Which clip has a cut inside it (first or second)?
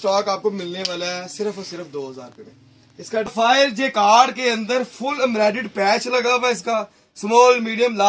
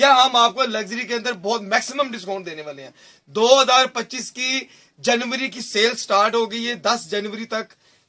first